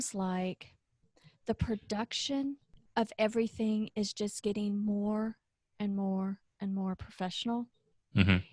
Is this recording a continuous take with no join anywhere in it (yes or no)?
no